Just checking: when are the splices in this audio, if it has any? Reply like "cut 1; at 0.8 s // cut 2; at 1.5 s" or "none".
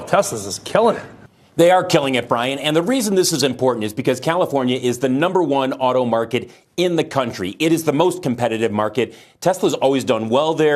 none